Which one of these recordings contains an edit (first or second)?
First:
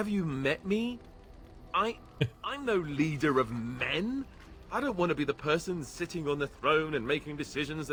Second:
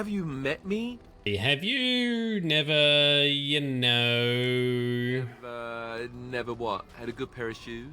second